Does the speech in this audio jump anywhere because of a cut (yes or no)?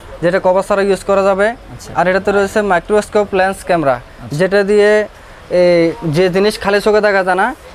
no